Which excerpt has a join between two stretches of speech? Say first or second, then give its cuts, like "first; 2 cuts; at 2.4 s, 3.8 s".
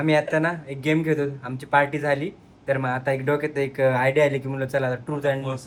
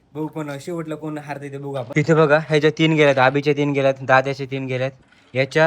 second; 1 cut; at 1.9 s